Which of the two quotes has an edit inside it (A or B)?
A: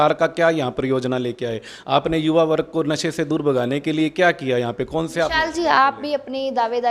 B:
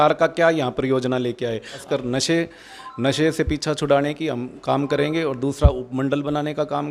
B